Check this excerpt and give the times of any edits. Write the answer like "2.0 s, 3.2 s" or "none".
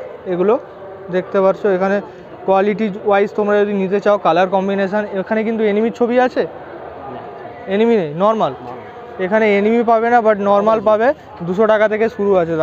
none